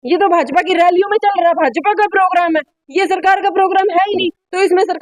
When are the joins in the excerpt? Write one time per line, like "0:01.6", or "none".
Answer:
none